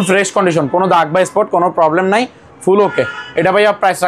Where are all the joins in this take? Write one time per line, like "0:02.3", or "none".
none